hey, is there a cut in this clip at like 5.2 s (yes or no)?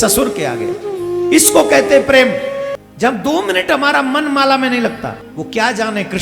yes